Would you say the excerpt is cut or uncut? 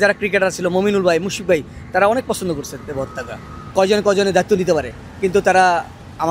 cut